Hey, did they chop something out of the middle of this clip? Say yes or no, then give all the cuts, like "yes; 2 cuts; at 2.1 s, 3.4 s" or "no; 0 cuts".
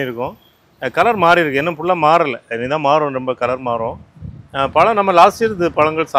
no; 0 cuts